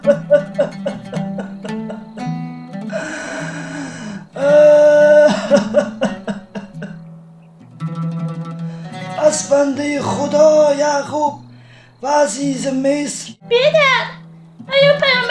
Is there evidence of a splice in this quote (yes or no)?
yes